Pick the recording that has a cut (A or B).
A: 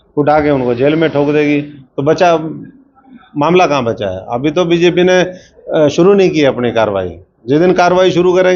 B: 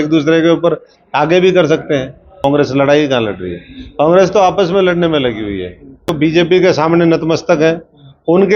B